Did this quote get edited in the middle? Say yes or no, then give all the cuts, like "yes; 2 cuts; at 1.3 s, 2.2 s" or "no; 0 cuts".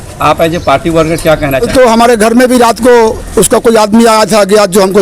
yes; 1 cut; at 1.5 s